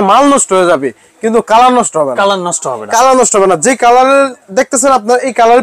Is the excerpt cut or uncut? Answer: uncut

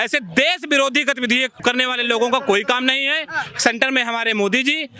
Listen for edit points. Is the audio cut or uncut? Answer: cut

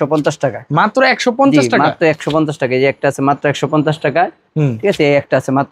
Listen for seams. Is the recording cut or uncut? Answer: uncut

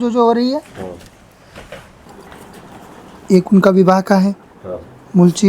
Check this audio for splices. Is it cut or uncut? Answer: cut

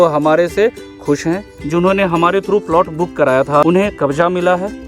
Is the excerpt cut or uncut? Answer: cut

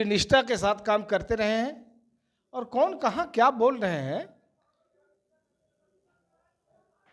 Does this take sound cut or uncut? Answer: uncut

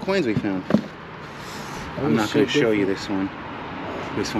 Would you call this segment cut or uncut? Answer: uncut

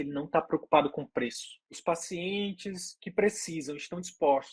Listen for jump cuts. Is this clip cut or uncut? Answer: cut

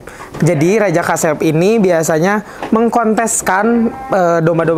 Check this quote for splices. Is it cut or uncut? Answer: uncut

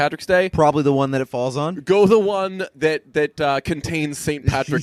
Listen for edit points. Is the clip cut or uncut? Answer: uncut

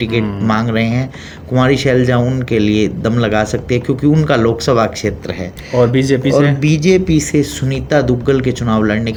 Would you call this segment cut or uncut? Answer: uncut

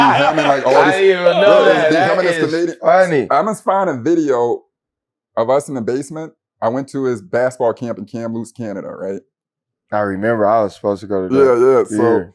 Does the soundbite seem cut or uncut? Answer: uncut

